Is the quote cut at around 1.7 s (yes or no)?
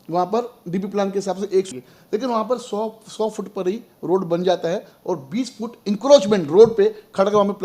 yes